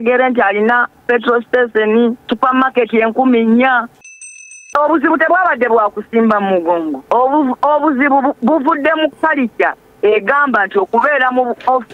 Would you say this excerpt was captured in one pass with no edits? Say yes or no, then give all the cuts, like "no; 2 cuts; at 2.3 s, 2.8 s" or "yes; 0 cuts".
no; 3 cuts; at 2.2 s, 4.5 s, 7.0 s